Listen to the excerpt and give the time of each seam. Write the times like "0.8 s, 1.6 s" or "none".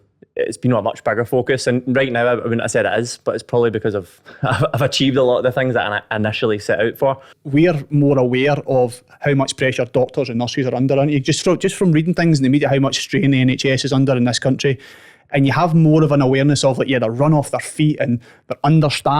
7.3 s